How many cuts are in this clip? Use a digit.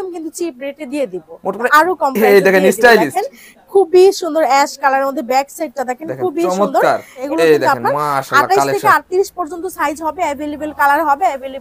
2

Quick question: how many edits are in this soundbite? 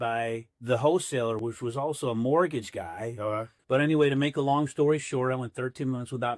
1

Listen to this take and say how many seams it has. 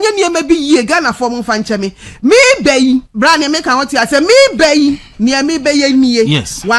1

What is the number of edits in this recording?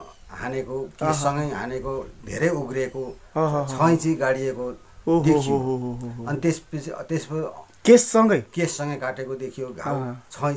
0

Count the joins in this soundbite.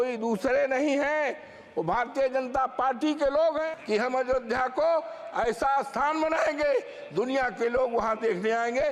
1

